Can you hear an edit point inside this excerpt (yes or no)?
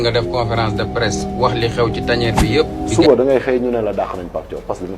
yes